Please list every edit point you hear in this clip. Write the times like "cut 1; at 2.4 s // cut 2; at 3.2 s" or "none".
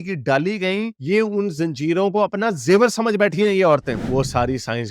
cut 1; at 3.9 s